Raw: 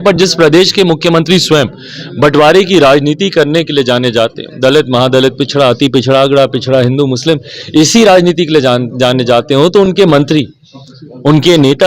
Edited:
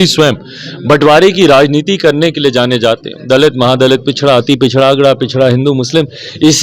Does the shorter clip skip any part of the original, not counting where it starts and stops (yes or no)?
no